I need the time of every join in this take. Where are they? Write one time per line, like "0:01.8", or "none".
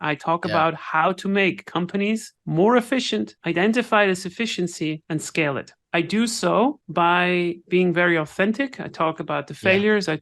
0:02.4
0:03.4
0:05.3
0:06.8